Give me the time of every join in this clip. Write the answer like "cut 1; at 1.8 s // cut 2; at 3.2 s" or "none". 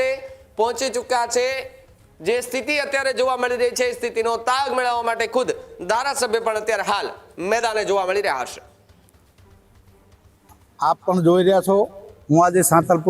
none